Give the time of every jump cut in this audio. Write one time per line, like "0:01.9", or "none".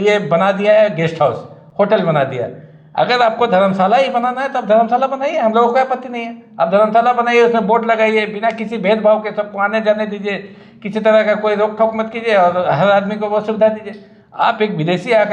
none